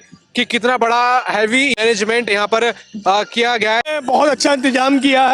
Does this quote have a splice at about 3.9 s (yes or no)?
yes